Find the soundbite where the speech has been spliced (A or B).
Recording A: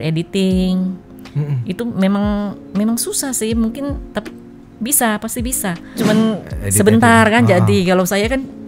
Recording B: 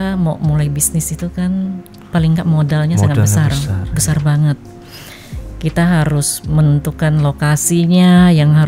A